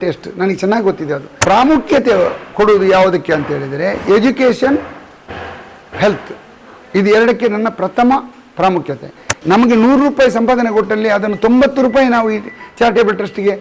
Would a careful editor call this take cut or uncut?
cut